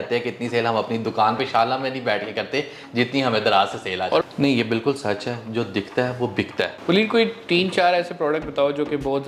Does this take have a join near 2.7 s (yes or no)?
no